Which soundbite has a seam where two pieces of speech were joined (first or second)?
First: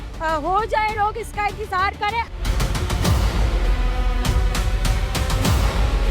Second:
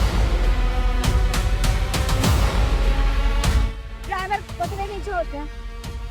first